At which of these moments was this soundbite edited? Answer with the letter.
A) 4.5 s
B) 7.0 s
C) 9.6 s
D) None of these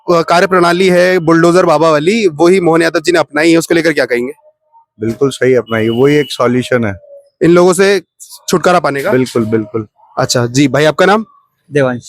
D